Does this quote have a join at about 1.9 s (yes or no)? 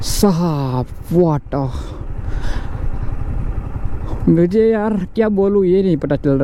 no